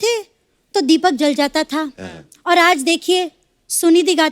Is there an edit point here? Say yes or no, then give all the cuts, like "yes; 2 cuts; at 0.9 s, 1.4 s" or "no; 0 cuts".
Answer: no; 0 cuts